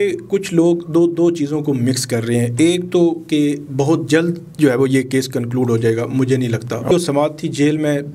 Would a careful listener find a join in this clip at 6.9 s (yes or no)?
yes